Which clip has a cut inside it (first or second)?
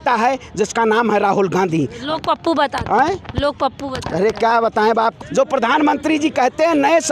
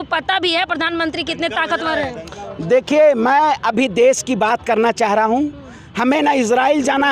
first